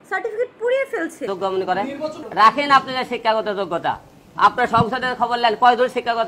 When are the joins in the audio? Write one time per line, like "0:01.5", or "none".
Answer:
0:01.2